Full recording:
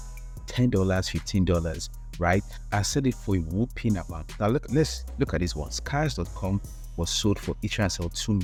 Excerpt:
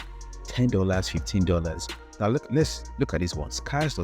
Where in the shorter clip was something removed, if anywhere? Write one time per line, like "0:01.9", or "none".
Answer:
0:02.0